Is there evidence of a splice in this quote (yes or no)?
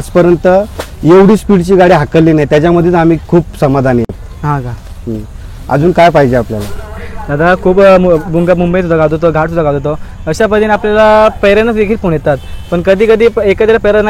no